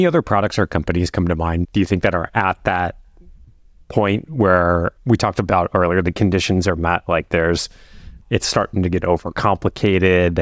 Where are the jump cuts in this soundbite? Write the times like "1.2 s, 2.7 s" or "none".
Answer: 1.6 s